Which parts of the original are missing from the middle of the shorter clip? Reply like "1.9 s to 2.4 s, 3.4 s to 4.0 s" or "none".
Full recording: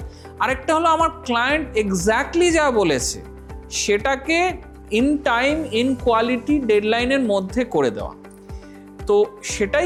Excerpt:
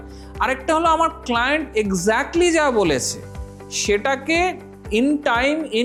none